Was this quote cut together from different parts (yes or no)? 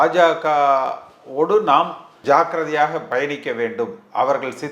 yes